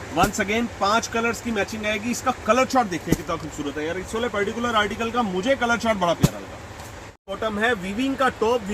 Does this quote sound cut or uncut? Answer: cut